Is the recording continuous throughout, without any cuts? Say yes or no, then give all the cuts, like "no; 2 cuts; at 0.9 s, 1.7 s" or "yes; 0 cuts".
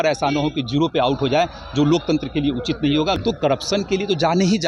no; 1 cut; at 3.2 s